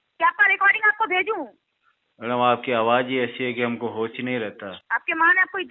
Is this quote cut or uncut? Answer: cut